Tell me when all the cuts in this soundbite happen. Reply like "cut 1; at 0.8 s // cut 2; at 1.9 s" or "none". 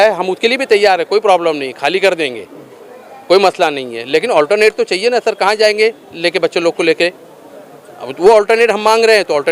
none